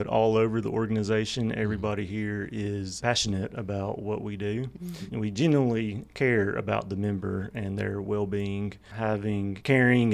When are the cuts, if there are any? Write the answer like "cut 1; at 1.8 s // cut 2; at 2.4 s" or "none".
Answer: cut 1; at 8.9 s